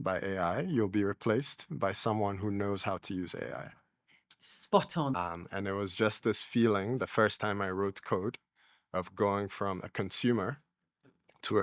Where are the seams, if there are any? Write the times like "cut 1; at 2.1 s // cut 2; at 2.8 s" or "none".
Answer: cut 1; at 5.2 s